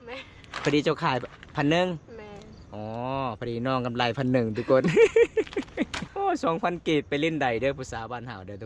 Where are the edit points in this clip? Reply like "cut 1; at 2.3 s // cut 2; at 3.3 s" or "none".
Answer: cut 1; at 6.0 s